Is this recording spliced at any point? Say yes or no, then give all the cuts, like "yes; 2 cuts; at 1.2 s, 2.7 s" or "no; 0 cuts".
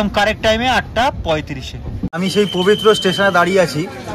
yes; 1 cut; at 2.2 s